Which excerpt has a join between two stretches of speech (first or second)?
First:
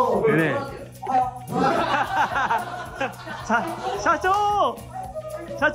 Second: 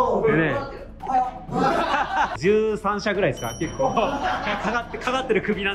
second